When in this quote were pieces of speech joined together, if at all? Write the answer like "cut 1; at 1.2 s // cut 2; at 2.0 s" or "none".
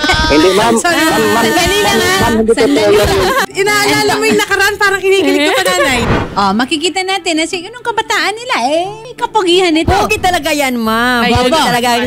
cut 1; at 3.4 s // cut 2; at 6.1 s // cut 3; at 9.0 s